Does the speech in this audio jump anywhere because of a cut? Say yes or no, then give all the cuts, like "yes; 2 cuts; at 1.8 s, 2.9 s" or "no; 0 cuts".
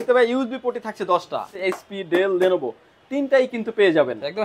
yes; 1 cut; at 1.5 s